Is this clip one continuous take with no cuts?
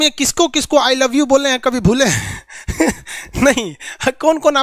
yes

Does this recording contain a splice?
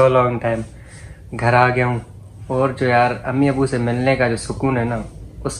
no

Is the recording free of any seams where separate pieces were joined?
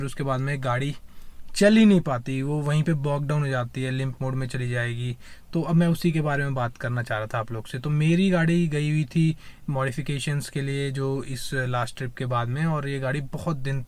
yes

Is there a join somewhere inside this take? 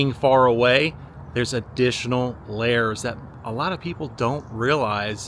no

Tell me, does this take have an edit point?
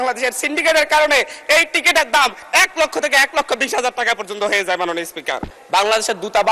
yes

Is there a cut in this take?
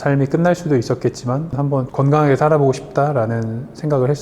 yes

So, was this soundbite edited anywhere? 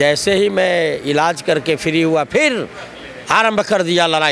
no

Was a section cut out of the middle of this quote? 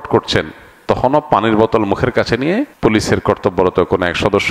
yes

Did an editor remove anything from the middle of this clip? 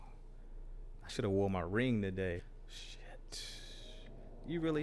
yes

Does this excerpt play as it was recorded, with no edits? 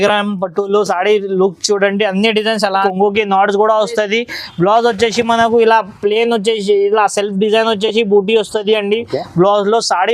no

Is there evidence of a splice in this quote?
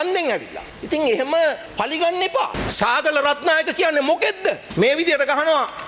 yes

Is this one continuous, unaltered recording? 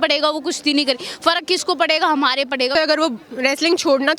no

